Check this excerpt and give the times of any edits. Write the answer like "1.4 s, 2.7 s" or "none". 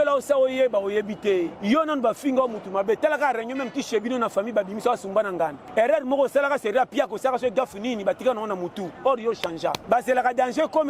1.5 s, 5.6 s, 9.8 s